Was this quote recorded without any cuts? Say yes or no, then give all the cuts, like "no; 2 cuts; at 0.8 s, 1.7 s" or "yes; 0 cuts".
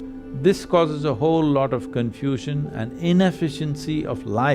yes; 0 cuts